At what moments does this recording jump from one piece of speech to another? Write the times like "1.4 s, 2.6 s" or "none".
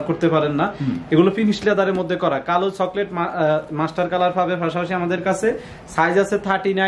none